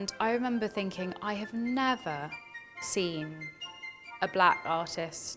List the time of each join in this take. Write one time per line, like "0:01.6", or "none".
none